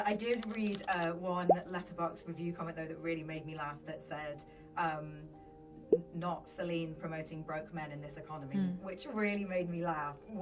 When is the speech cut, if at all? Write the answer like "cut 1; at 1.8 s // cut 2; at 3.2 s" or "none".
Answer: none